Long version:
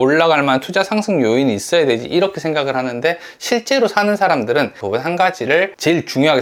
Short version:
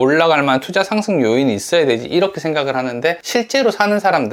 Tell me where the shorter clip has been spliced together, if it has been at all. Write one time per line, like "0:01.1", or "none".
0:03.2